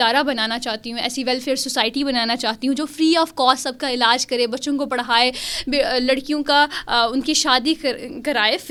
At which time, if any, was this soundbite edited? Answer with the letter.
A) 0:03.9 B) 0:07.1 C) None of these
C